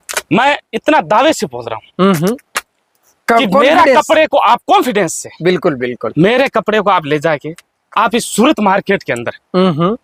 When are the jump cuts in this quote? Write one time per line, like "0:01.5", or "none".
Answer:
none